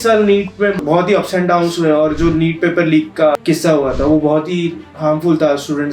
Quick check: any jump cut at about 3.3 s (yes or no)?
yes